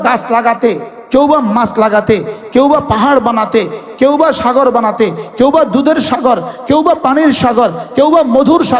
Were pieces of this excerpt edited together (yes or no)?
no